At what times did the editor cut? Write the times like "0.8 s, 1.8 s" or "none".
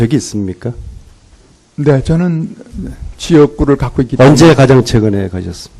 3.9 s